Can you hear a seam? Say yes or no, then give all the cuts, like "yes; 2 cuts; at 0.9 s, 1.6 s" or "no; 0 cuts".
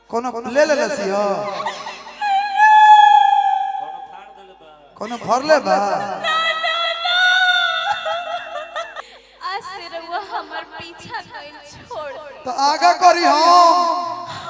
yes; 1 cut; at 8.9 s